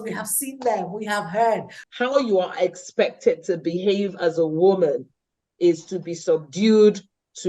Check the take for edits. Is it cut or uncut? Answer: cut